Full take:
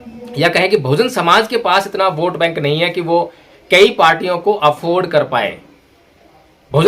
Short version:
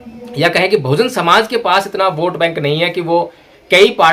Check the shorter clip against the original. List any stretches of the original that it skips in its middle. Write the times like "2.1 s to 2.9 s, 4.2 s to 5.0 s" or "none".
none